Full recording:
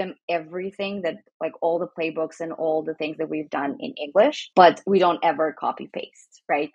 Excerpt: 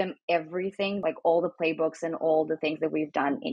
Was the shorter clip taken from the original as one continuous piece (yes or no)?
no